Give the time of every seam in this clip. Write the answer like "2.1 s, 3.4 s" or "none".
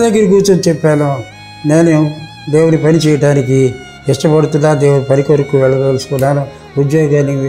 none